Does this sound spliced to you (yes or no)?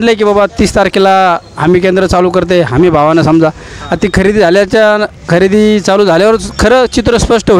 no